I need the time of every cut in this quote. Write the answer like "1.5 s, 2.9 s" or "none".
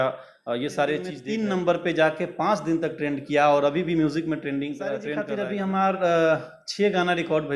1.2 s, 5.2 s